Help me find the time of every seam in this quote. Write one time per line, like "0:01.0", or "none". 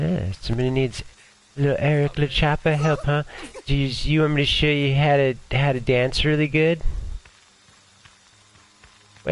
0:08.4